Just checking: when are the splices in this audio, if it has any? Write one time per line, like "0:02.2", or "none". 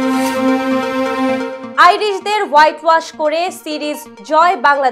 none